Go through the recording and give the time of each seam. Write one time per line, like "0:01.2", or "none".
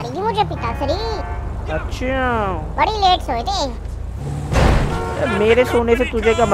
none